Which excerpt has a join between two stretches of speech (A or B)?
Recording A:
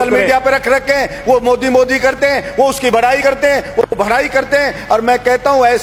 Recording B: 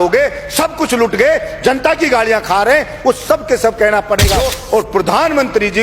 B